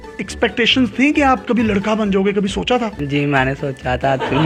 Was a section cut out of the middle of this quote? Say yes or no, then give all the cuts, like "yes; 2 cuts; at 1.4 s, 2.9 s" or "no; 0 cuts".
no; 0 cuts